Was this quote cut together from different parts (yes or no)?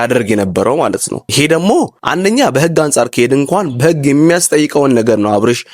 yes